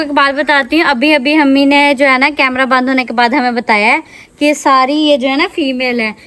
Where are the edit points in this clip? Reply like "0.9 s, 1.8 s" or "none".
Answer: none